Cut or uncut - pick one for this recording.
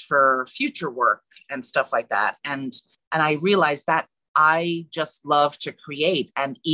cut